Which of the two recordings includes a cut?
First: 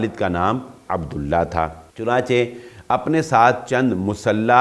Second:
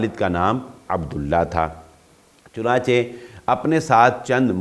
first; 1 cut; at 1.9 s

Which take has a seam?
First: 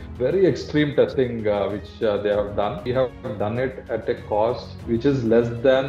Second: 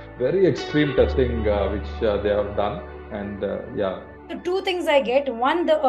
first; 2 cuts; at 2.8 s, 4.7 s

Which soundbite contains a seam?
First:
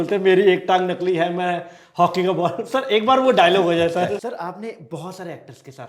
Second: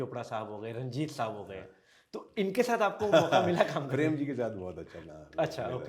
first; 1 cut; at 4.3 s

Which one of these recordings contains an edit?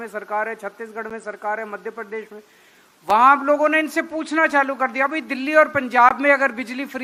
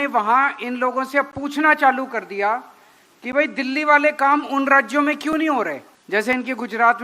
second; 1 cut; at 5.9 s

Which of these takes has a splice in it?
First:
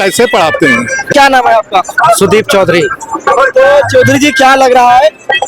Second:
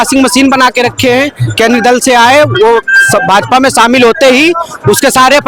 first; 1 cut; at 1.0 s

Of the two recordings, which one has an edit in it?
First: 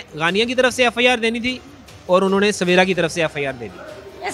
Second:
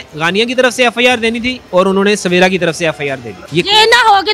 second; 2 cuts; at 1.5 s, 3.4 s

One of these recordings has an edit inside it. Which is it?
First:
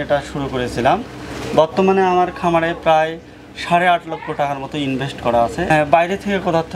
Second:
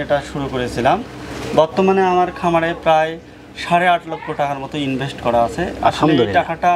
first; 1 cut; at 5.7 s

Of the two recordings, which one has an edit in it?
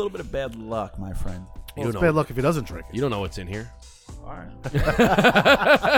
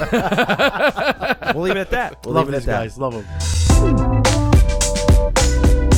second; 1 cut; at 3.4 s

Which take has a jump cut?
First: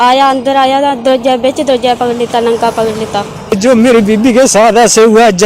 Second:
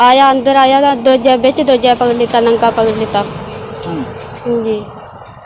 first; 1 cut; at 3.5 s

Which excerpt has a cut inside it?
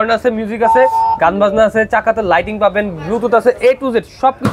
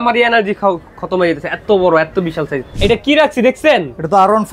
second; 1 cut; at 2.7 s

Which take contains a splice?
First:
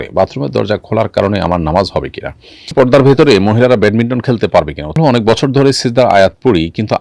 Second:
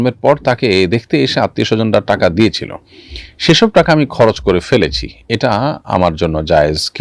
first; 2 cuts; at 2.7 s, 5.0 s

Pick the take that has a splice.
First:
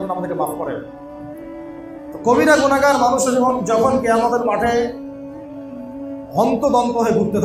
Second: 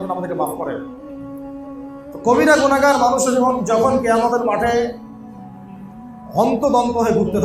second; 2 cuts; at 0.8 s, 2.2 s

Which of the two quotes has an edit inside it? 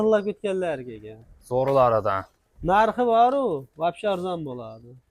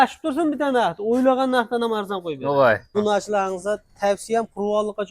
second; 1 cut; at 2.9 s

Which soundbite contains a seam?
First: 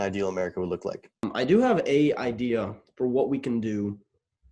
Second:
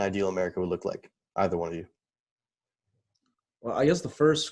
first; 1 cut; at 1.2 s

